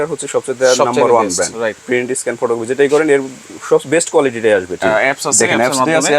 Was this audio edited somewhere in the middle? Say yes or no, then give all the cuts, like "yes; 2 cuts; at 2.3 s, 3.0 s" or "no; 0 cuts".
yes; 2 cuts; at 1.8 s, 4.8 s